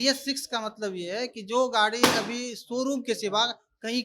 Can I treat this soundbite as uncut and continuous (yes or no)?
yes